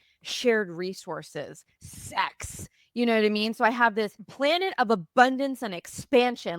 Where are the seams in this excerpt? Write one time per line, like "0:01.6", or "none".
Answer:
0:04.2